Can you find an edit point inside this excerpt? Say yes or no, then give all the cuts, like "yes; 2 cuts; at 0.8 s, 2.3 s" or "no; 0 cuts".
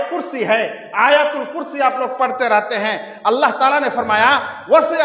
no; 0 cuts